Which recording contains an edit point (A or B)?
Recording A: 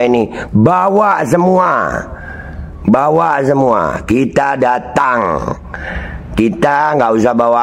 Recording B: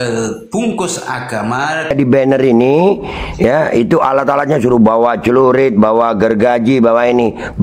B